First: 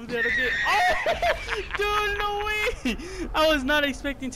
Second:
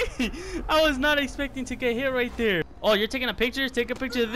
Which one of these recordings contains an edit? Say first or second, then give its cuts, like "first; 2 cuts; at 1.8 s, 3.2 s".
second; 1 cut; at 2.7 s